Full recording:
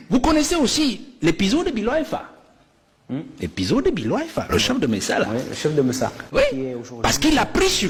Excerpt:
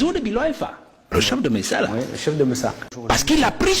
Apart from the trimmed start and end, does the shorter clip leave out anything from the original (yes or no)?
yes